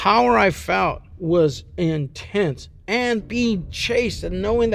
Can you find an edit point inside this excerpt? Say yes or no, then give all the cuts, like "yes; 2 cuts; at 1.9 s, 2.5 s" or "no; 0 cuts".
yes; 2 cuts; at 1.1 s, 3.2 s